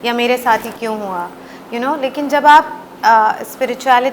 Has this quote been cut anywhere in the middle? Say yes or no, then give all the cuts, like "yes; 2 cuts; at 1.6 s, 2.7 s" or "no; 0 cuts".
no; 0 cuts